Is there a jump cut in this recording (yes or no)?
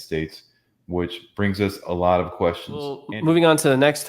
yes